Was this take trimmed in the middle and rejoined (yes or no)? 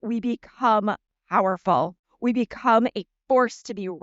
yes